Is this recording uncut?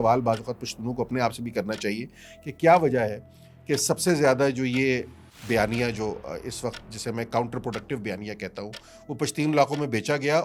yes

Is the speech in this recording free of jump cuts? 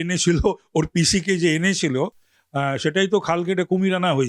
yes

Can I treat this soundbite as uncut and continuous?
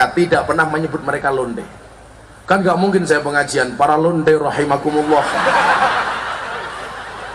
yes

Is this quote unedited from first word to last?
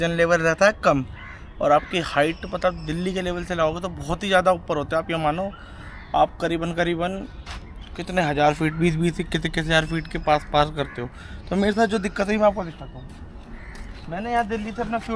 yes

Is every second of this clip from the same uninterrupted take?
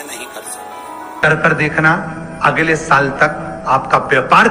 no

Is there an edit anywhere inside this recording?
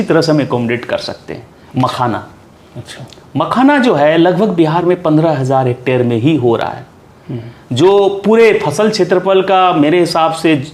no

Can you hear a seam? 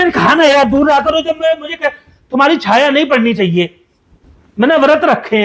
no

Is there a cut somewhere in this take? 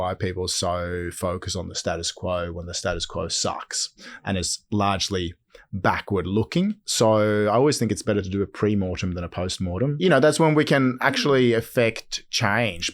yes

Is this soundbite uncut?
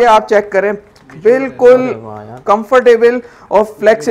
yes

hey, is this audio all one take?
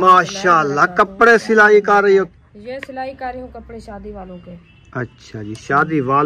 no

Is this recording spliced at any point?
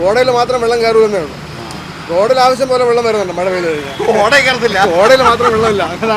no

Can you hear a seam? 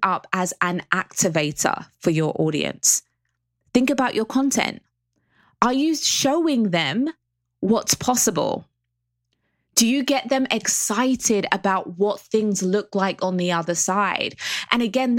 yes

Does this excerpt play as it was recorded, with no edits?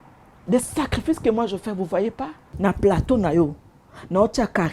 no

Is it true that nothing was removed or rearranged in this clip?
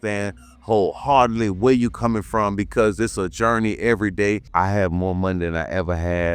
no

